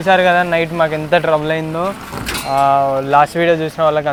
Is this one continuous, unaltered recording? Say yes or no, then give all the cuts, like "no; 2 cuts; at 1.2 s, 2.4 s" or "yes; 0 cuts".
yes; 0 cuts